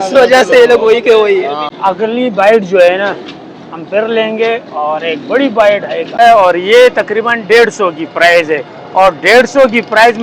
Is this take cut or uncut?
cut